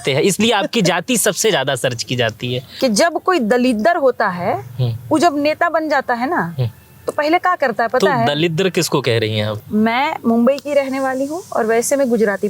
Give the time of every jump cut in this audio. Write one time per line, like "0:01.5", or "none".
0:02.6
0:09.6